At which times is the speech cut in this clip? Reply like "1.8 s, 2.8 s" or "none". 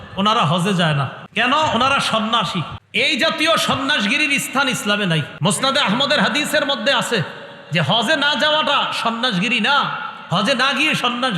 1.2 s, 2.8 s, 5.3 s

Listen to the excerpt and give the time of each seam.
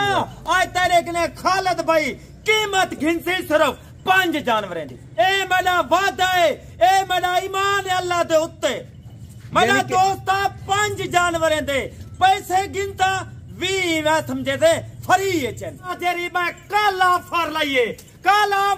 5.0 s, 15.9 s

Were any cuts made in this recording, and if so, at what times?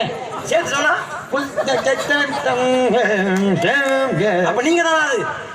none

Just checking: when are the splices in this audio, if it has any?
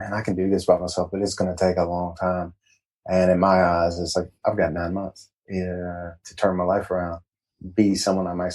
7.2 s

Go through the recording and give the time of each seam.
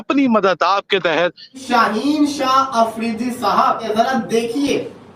1.5 s, 3.9 s

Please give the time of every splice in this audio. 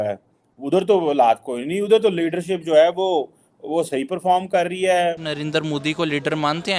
5.3 s

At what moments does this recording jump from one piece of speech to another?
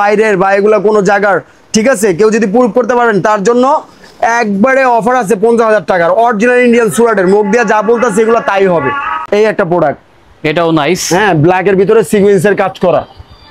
9.1 s

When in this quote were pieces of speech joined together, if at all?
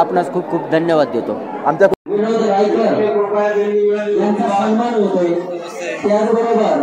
none

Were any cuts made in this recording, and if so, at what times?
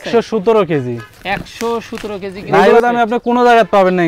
2.8 s

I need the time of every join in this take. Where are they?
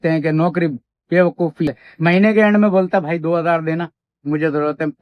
1.6 s

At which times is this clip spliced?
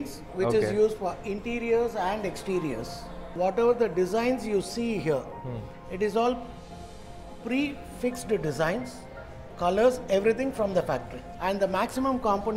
3.3 s, 11.2 s

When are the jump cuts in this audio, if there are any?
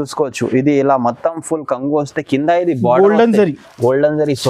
none

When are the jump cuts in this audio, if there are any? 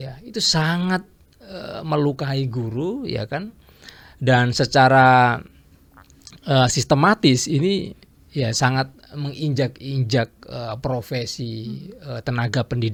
none

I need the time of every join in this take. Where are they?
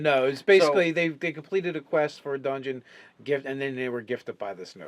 2.2 s

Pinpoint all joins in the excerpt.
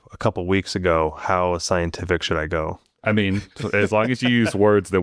2.9 s

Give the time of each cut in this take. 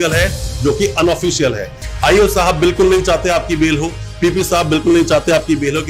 1.8 s

